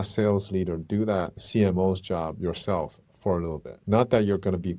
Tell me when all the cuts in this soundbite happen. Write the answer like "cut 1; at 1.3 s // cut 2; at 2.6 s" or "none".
cut 1; at 1.4 s // cut 2; at 3.7 s